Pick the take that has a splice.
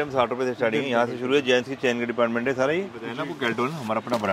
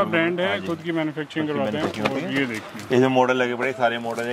first; 1 cut; at 3.0 s

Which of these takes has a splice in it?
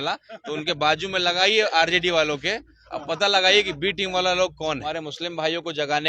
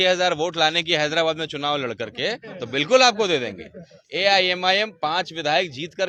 first; 1 cut; at 4.9 s

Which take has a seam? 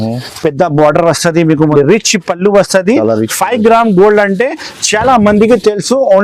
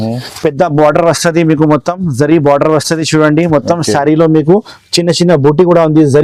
first; 1 cut; at 1.7 s

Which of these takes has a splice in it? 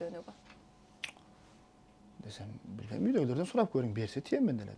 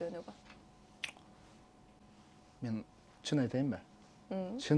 first; 1 cut; at 2.0 s

